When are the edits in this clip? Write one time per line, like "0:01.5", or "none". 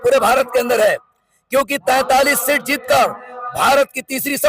none